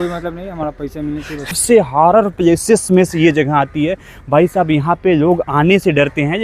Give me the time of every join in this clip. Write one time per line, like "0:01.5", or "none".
0:01.6

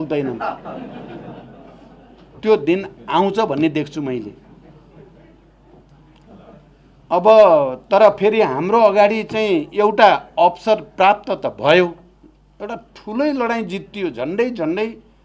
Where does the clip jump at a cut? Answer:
none

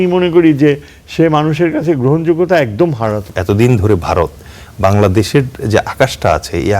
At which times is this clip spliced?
0:03.3

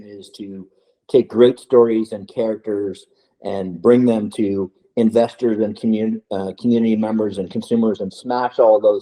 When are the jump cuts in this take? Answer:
none

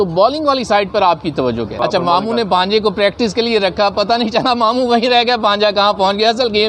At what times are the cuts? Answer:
0:01.8

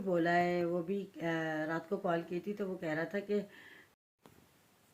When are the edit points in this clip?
0:03.9

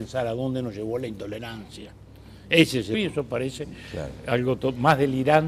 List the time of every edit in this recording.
none

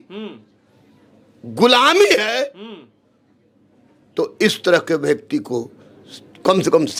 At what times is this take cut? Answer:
none

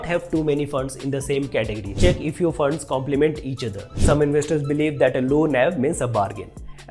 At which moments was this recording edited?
0:02.2
0:04.1

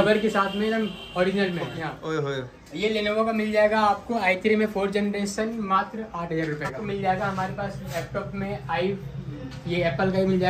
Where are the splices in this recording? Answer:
0:01.8
0:06.8

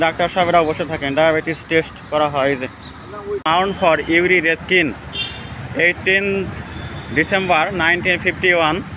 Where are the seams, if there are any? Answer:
0:03.5

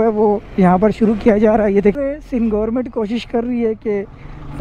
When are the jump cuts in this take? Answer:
0:01.9

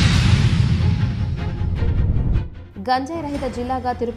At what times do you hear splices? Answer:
none

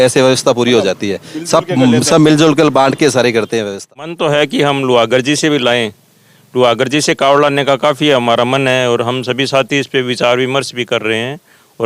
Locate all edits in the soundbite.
0:04.1

